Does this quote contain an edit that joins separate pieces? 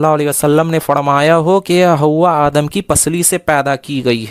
no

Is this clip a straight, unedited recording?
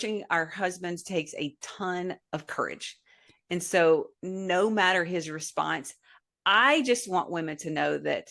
yes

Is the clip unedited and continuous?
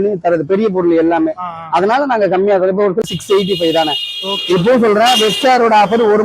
no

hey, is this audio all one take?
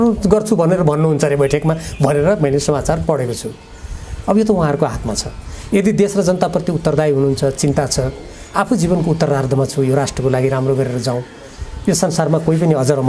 yes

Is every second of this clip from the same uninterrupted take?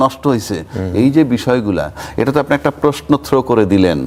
yes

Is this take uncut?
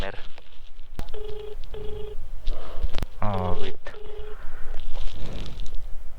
no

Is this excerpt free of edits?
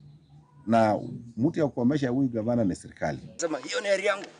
no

